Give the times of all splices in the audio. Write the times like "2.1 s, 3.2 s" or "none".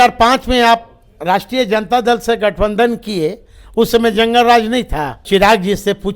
5.2 s